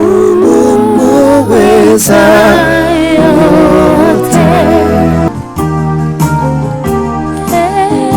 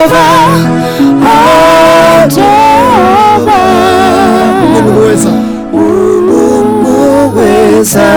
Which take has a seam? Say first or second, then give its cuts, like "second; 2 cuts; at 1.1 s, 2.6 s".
first; 1 cut; at 5.3 s